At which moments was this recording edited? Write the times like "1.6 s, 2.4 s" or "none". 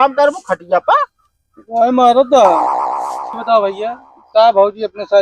3.0 s